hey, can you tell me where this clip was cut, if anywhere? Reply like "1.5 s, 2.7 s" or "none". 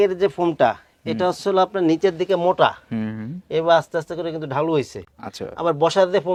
none